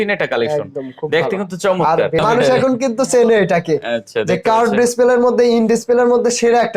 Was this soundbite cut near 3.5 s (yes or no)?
no